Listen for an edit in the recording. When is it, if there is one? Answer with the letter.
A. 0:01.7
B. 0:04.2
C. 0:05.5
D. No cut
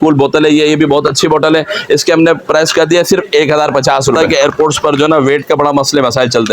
B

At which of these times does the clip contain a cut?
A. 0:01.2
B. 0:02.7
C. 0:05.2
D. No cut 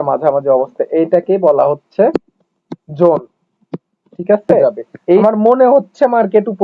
C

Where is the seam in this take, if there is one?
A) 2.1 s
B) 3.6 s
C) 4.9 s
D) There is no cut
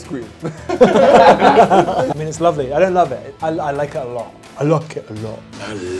A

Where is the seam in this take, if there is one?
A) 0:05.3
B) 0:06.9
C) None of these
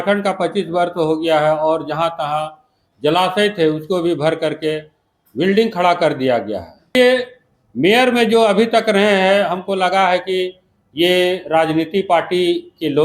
B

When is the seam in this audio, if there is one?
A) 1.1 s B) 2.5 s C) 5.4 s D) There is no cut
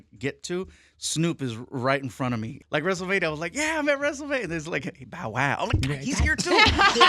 B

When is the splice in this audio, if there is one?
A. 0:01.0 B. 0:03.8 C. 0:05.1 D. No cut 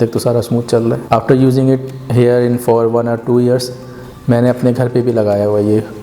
A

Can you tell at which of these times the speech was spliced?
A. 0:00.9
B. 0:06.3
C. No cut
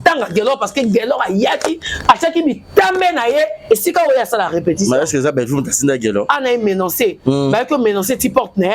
B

